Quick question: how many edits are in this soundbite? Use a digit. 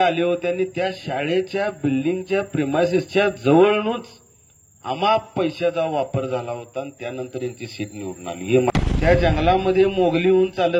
1